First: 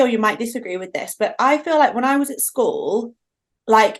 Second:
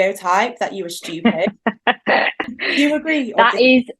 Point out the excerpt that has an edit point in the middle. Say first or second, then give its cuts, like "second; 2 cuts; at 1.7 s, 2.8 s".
second; 1 cut; at 2.5 s